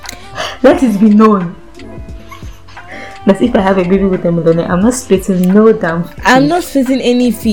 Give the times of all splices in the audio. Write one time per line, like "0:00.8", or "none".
none